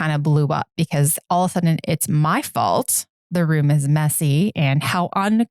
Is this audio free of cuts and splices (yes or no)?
no